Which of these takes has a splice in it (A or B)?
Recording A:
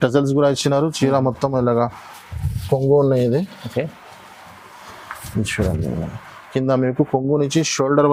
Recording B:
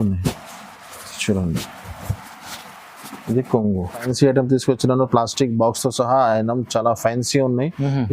B